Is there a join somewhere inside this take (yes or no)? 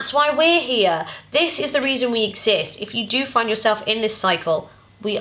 no